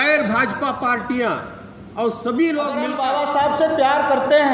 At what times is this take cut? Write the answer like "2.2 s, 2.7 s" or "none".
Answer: 2.9 s